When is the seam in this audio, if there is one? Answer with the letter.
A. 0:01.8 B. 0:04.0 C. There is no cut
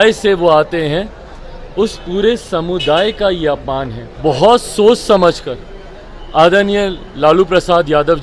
B